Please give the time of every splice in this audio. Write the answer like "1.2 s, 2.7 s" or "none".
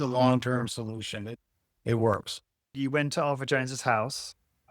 2.7 s

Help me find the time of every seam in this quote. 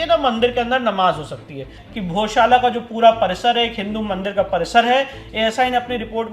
1.8 s

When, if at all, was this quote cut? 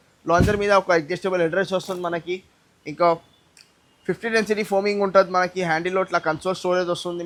none

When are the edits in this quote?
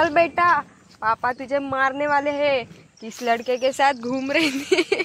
none

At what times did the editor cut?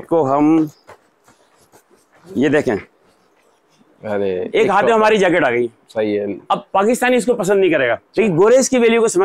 4.4 s, 8.0 s

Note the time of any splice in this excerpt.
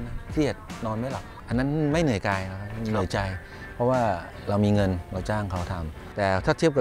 1.3 s

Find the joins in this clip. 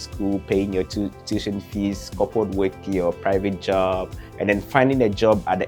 none

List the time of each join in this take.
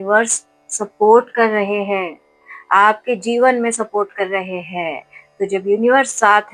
none

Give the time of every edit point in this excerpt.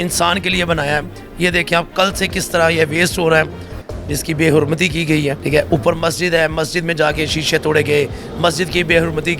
5.4 s

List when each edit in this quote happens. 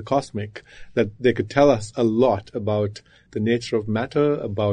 3.3 s

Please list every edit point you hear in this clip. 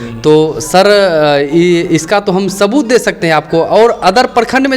none

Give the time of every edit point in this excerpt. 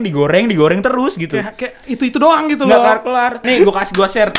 3.4 s

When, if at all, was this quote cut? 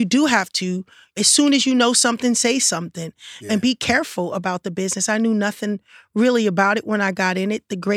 3.4 s

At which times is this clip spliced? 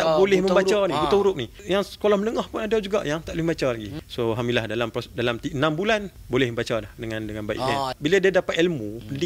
1.6 s, 3.9 s, 6.2 s, 7.9 s

